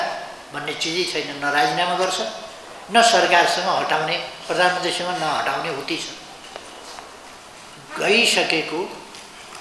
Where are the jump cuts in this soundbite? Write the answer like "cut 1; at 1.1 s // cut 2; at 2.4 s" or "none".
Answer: cut 1; at 7.4 s